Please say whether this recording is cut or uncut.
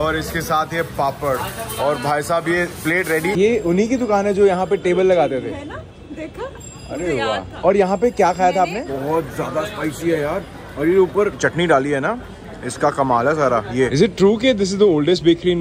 cut